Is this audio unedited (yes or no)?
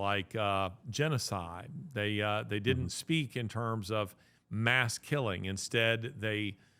yes